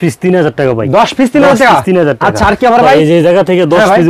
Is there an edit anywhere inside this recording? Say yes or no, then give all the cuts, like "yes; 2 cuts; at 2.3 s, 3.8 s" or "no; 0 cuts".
no; 0 cuts